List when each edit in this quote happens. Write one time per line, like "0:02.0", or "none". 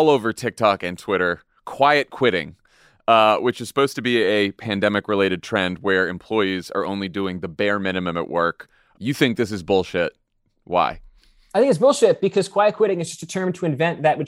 0:08.8